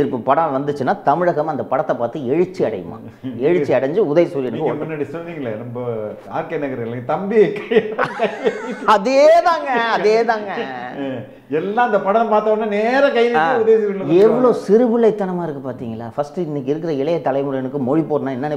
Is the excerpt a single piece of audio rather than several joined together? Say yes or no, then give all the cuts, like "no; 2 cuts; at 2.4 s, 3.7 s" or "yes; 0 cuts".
yes; 0 cuts